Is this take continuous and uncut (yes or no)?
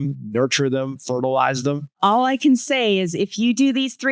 no